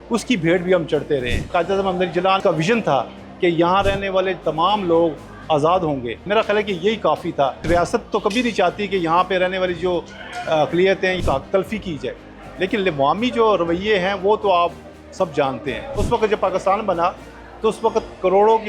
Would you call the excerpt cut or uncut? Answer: cut